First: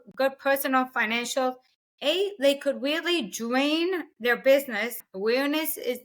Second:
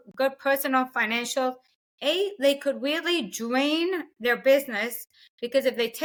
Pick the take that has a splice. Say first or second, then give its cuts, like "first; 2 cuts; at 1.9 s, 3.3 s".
first; 1 cut; at 5.1 s